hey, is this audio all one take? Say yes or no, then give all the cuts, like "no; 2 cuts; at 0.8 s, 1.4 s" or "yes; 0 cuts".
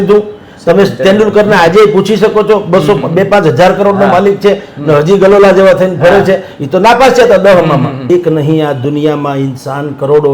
no; 1 cut; at 8.0 s